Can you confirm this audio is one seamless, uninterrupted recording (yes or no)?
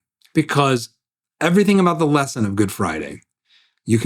yes